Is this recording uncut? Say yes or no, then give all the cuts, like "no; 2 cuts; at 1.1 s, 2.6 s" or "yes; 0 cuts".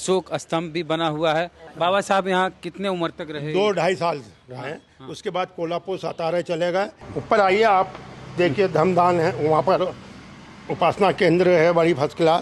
no; 2 cuts; at 1.6 s, 7.0 s